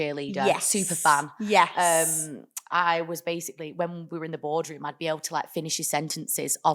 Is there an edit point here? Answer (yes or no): no